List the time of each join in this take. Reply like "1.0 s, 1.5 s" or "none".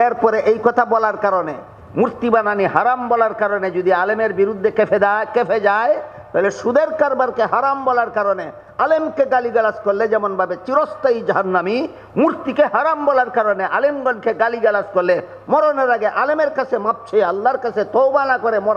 none

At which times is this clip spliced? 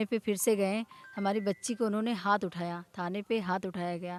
none

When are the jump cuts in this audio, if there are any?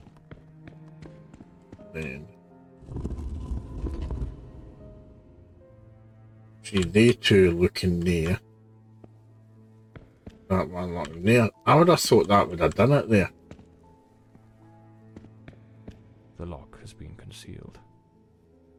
none

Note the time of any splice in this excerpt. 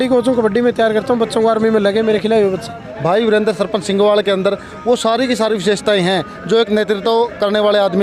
2.9 s

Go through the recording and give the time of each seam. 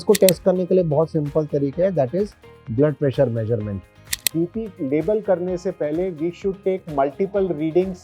4.1 s

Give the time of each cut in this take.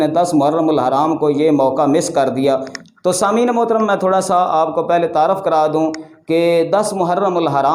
none

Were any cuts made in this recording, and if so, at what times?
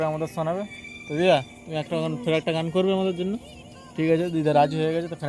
none

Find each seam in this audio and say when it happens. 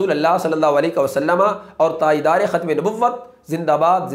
none

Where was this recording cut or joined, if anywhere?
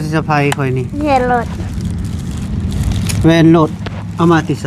none

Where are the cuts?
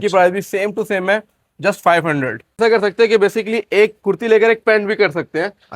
2.6 s

